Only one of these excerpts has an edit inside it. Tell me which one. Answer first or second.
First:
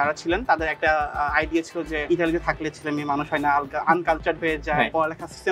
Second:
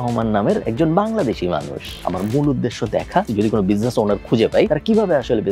second